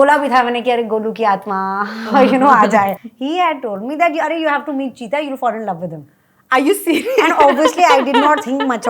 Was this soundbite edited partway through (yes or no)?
yes